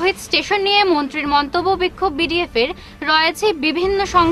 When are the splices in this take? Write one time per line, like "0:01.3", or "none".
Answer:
none

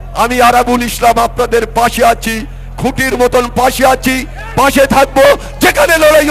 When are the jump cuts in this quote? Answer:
none

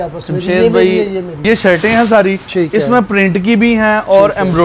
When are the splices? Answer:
0:01.4

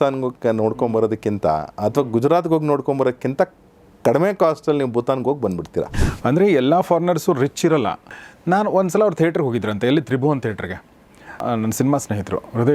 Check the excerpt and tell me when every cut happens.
0:05.9
0:08.1
0:11.4

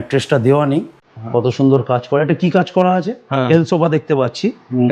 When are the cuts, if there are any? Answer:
0:03.2

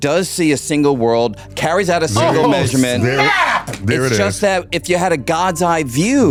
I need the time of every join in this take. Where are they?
none

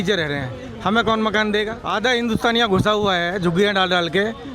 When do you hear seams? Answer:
0:01.8

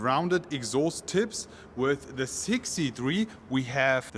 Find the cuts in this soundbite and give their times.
none

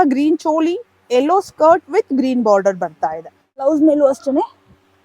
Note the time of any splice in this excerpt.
0:03.6

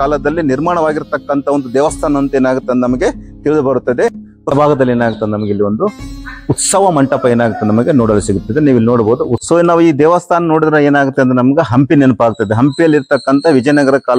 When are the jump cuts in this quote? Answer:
0:04.5
0:09.4

